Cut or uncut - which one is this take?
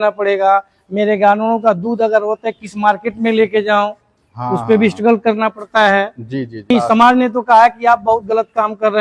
cut